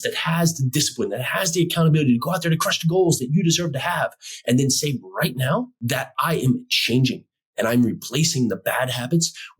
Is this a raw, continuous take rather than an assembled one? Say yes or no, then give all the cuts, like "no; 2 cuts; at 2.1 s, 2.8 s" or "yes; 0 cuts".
no; 1 cut; at 5.8 s